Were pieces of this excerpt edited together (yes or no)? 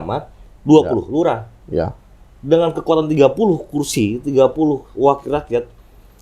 no